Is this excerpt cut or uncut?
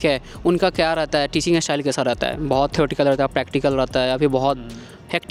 uncut